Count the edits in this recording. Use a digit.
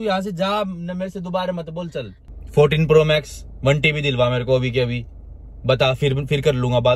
1